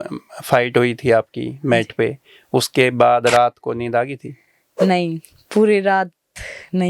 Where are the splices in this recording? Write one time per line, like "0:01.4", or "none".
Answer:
none